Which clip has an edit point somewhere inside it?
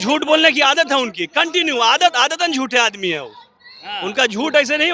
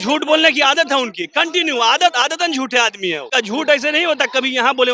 second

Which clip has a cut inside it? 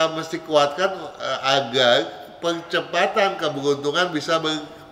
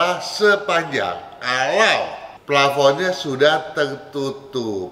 second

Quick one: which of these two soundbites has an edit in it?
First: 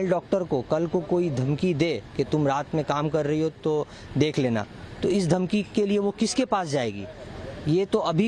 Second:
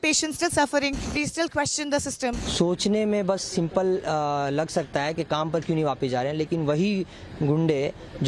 second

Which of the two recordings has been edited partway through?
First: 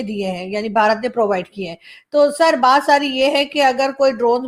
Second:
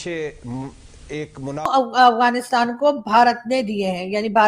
second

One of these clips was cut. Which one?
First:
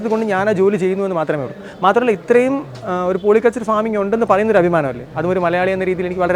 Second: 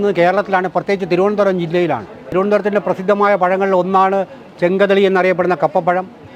second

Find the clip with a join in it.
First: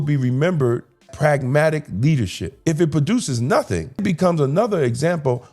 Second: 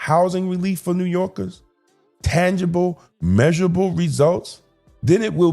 first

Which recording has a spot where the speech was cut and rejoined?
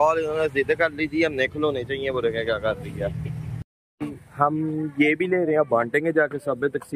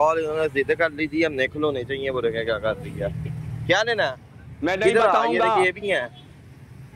first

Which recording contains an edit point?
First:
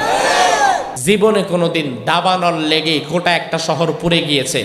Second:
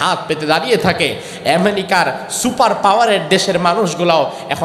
first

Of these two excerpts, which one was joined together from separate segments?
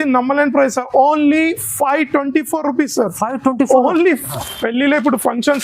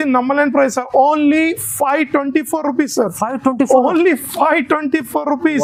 first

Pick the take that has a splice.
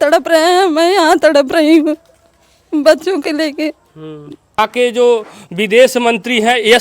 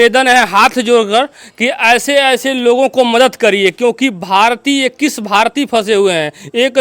first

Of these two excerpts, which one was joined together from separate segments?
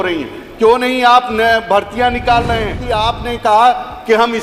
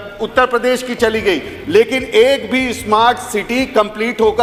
first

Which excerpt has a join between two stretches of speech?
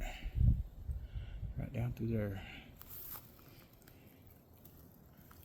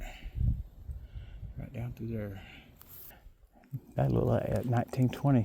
second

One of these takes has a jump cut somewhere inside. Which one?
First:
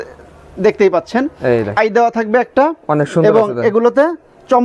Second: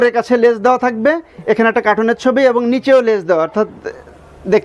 first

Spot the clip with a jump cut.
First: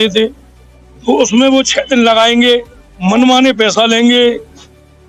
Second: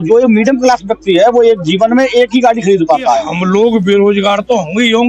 second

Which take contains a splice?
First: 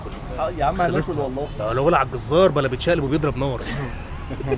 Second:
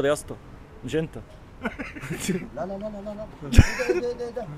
second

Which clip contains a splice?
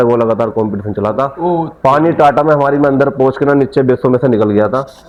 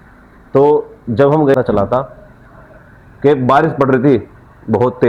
second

